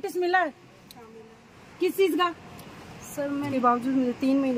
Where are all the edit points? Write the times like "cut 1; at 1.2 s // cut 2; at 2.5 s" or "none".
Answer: cut 1; at 3.5 s